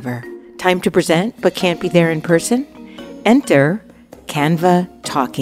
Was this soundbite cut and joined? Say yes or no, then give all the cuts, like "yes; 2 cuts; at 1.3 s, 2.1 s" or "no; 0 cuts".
no; 0 cuts